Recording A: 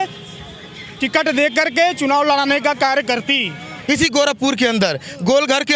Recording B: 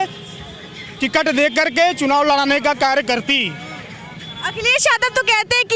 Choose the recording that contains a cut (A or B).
A